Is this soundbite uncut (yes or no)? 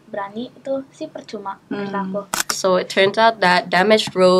no